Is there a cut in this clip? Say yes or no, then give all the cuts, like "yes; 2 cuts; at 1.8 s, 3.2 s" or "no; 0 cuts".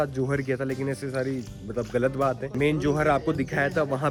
no; 0 cuts